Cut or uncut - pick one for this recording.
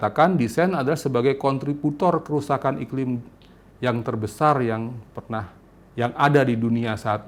uncut